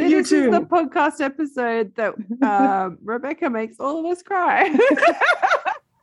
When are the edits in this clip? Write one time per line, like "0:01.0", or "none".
none